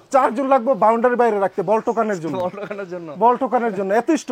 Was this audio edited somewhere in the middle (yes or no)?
no